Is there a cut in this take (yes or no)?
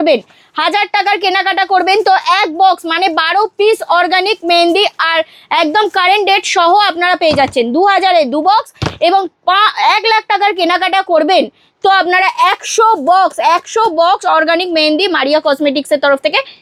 no